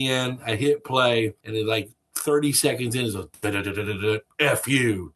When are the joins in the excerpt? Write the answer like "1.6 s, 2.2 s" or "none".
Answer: 1.4 s